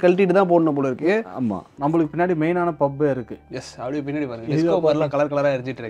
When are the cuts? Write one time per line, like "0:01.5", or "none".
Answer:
0:01.7